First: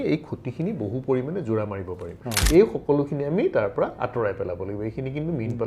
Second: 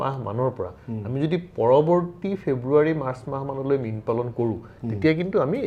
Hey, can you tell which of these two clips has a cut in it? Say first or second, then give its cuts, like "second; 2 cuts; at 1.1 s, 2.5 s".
first; 1 cut; at 2.3 s